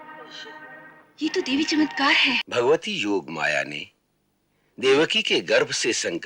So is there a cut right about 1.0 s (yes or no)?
no